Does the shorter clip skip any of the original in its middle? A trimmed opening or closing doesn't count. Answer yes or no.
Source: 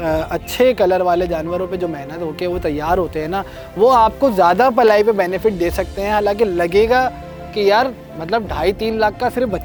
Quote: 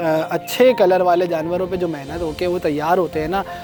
no